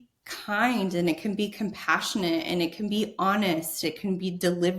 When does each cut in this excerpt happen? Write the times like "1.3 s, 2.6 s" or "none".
3.8 s

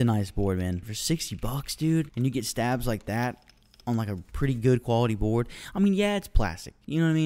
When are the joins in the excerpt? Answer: none

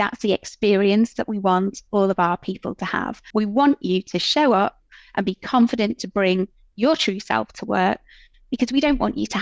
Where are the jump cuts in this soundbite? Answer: 3.2 s

